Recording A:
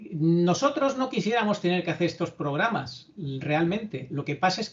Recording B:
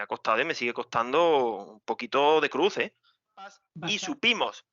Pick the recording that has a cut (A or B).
B